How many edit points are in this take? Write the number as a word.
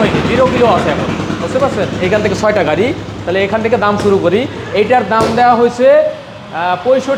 zero